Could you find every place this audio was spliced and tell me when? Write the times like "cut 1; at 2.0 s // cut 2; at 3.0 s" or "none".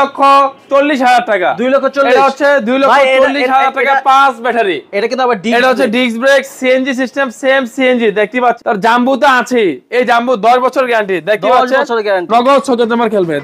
cut 1; at 8.6 s